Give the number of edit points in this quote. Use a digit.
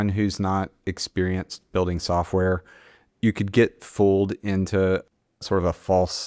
1